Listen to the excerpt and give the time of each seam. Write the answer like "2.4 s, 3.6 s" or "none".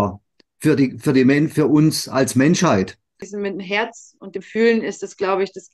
3.2 s